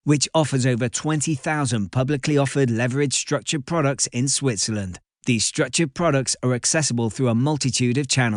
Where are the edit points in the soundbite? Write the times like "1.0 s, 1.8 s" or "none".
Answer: none